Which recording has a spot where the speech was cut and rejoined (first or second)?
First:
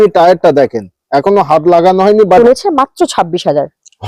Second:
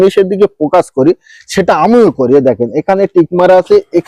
first